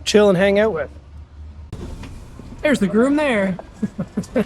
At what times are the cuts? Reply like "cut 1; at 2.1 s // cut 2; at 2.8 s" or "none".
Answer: cut 1; at 1.6 s

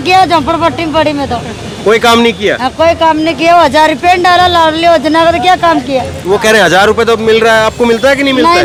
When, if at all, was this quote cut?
none

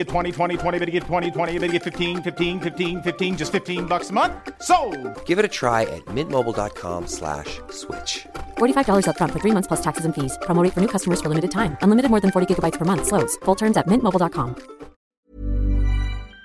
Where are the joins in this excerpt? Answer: cut 1; at 15.2 s

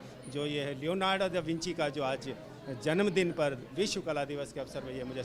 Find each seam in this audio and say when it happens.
none

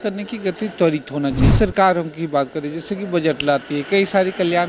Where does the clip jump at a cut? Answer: cut 1; at 1.4 s

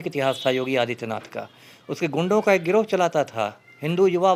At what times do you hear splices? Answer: none

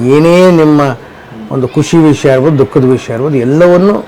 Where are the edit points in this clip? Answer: none

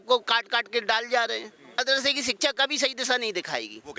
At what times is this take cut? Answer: cut 1; at 1.8 s

